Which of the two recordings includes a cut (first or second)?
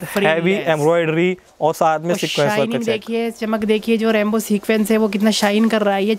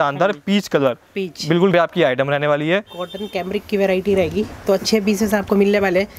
second